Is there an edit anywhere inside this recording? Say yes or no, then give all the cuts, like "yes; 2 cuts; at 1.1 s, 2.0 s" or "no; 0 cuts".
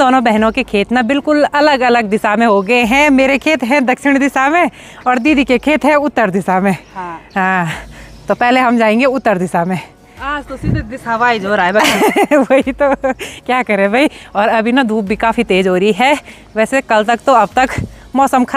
no; 0 cuts